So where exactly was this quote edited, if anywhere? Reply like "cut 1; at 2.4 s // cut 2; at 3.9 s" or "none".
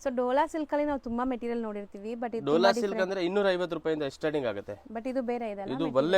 none